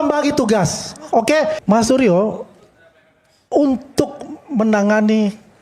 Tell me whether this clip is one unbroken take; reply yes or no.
no